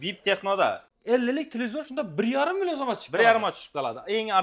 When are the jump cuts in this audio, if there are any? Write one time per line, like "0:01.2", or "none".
0:00.9